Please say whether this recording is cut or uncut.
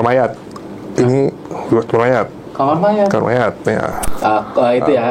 cut